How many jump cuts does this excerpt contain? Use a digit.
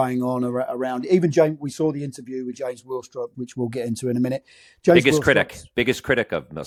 0